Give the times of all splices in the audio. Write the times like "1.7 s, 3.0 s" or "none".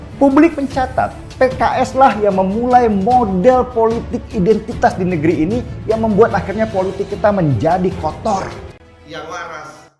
8.6 s